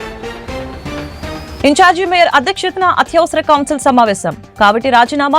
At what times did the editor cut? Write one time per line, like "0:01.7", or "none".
0:01.5